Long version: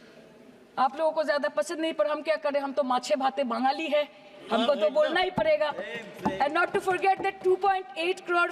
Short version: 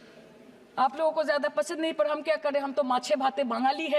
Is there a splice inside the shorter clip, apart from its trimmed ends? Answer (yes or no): no